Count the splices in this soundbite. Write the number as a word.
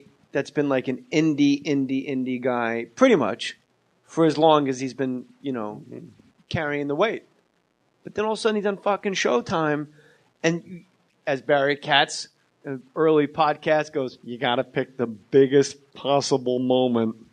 one